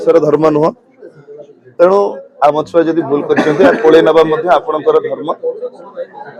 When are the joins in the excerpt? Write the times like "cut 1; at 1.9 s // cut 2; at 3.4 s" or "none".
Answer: none